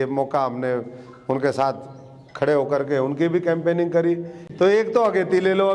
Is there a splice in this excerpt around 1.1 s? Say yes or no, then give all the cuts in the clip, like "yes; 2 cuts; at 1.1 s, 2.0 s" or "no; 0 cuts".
no; 1 cut; at 4.4 s